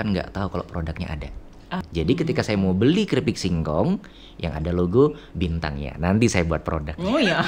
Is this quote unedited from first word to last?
no; 1 cut; at 1.8 s

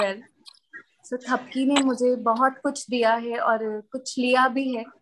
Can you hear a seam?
no; 0 cuts

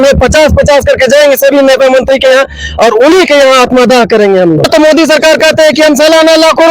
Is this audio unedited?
no; 1 cut; at 4.7 s

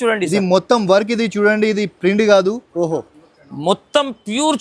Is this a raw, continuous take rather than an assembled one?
yes; 0 cuts

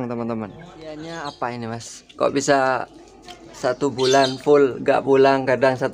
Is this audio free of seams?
no; 1 cut; at 1.0 s

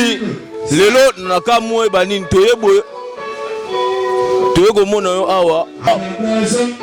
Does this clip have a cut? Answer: yes; 1 cut; at 5.9 s

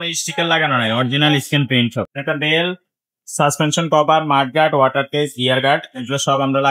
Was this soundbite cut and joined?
yes; 1 cut; at 2.2 s

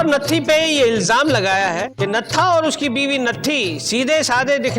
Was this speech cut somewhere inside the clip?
yes; 1 cut; at 1.9 s

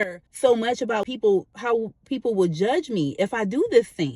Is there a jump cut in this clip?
no; 0 cuts

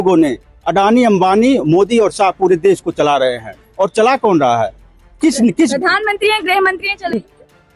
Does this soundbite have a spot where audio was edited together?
no; 0 cuts

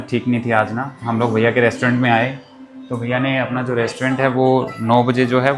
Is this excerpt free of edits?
yes; 0 cuts

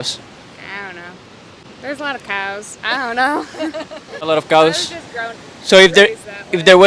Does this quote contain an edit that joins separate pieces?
yes; 2 cuts; at 1.6 s, 4.1 s

